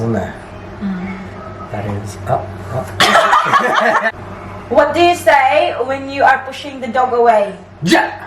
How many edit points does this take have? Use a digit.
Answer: 1